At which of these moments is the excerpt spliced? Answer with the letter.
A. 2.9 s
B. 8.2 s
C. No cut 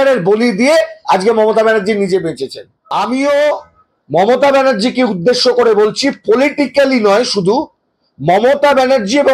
A